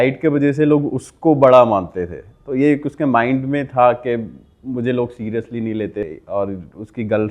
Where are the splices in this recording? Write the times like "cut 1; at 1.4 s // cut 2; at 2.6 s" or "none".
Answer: cut 1; at 6.0 s